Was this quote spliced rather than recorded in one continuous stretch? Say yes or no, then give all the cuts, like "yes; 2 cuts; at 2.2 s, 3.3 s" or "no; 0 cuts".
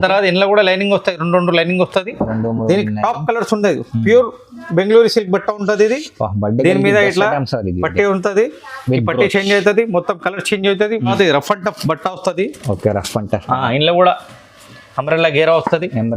yes; 1 cut; at 11.1 s